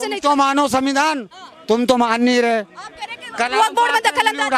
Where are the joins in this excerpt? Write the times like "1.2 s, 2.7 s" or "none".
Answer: none